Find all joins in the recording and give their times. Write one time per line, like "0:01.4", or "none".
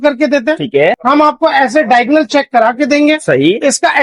0:01.0